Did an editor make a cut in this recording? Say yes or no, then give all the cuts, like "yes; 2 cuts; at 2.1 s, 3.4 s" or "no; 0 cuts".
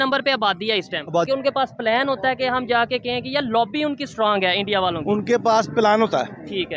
yes; 1 cut; at 1.3 s